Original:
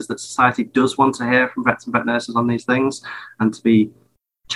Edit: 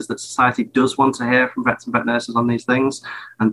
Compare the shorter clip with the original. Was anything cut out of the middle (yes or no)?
no